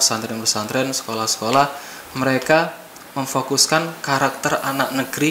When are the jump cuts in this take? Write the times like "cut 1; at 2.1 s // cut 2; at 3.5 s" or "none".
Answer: none